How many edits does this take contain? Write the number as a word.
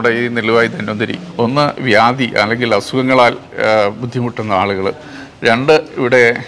one